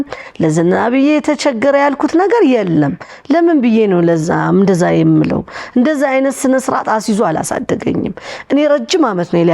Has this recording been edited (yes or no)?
no